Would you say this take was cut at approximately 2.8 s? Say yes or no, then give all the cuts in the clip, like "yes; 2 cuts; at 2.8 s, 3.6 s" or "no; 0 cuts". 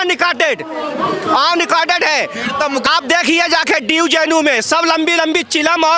yes; 1 cut; at 2.8 s